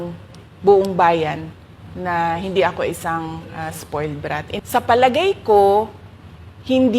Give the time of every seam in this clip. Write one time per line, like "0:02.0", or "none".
0:04.6